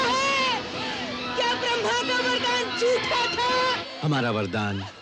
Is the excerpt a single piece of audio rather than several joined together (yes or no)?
no